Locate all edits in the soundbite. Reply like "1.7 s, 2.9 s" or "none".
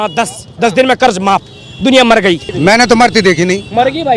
2.5 s